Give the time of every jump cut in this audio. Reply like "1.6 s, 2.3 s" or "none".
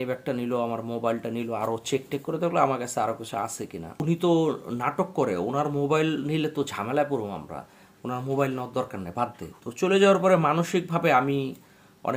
4.0 s, 9.4 s